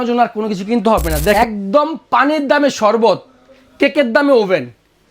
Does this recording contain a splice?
yes; 1 cut; at 1.3 s

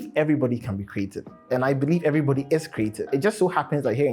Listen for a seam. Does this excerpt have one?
yes; 1 cut; at 3.1 s

